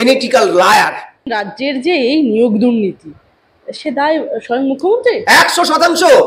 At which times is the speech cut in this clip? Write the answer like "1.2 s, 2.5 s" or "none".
1.3 s